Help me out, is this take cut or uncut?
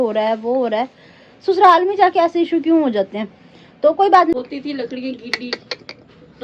cut